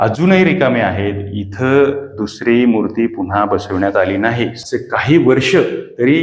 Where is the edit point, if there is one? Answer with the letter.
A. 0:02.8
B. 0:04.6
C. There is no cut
B